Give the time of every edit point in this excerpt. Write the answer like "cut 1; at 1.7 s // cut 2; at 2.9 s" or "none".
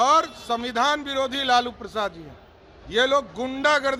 none